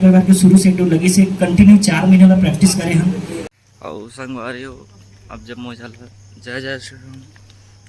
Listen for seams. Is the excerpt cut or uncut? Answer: cut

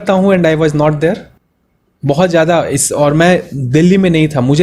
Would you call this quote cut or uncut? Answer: uncut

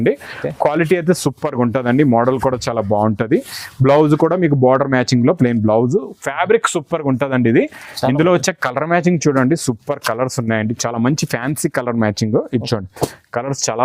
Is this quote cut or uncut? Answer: uncut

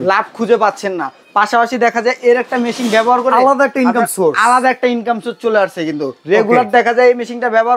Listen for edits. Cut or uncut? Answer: uncut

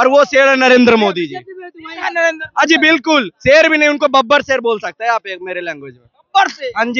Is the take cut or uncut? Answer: uncut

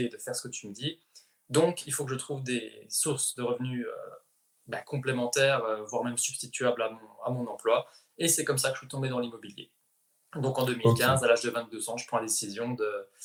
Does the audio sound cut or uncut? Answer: uncut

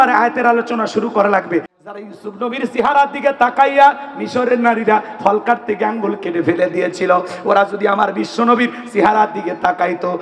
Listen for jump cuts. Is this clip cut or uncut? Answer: cut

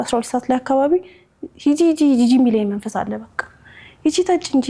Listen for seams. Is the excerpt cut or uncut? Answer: uncut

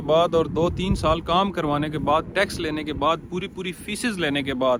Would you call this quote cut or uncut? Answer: uncut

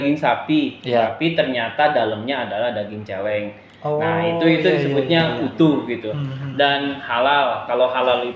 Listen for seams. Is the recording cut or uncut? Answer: uncut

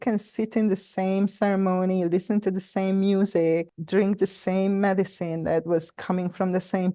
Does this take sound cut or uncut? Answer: uncut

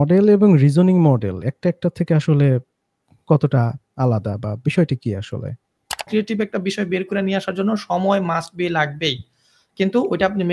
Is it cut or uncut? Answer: cut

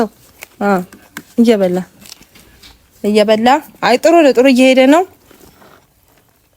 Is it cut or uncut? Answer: cut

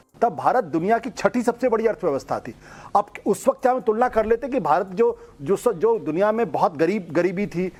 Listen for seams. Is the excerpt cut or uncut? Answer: uncut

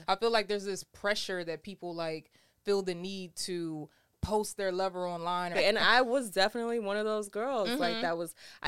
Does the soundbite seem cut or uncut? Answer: cut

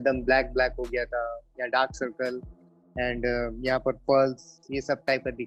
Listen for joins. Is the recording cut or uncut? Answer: uncut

